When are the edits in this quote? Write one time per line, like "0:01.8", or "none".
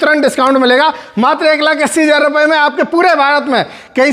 none

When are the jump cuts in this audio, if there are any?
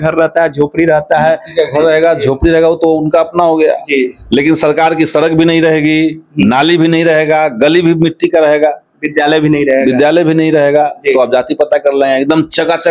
none

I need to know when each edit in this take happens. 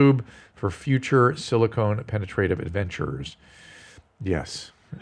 none

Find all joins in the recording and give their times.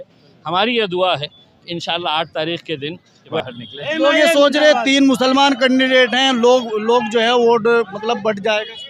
0:03.4

